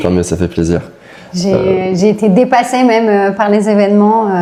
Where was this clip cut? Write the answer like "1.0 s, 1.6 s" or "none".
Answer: none